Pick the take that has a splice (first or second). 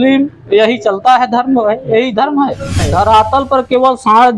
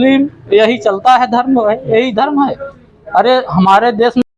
first